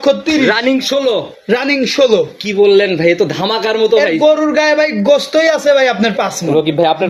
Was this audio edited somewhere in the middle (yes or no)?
no